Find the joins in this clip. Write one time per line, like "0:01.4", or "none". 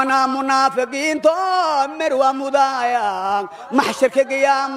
none